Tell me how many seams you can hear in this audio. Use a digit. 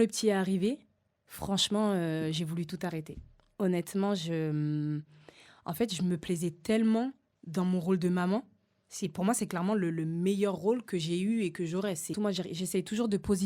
1